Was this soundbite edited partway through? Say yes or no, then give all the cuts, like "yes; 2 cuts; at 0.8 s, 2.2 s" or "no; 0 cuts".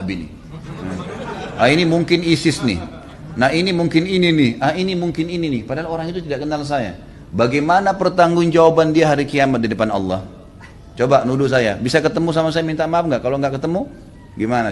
no; 0 cuts